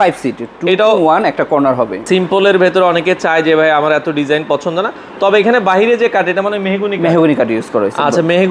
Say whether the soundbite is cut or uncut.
cut